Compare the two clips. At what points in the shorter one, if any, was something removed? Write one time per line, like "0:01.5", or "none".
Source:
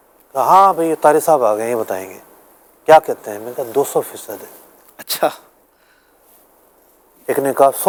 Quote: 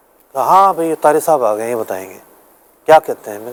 none